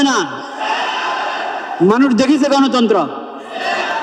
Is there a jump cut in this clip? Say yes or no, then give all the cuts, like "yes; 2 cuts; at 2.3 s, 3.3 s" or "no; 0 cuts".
no; 0 cuts